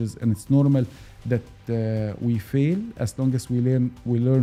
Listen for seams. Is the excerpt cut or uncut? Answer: uncut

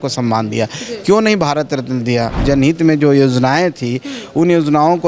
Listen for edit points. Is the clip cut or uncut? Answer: cut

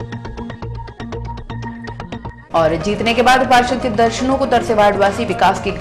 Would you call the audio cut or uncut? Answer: uncut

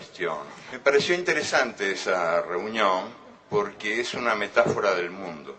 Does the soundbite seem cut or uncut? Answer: uncut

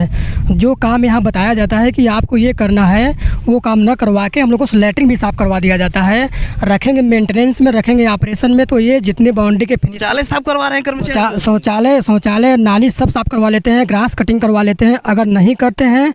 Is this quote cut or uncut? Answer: uncut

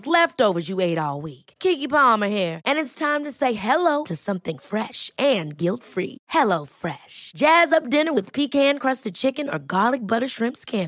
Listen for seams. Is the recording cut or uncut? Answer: uncut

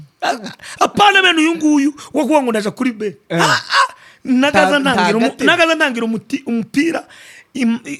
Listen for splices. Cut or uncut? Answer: uncut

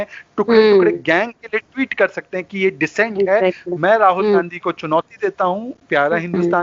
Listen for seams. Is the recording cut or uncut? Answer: uncut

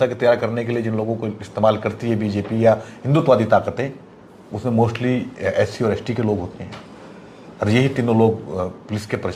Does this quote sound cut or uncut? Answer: uncut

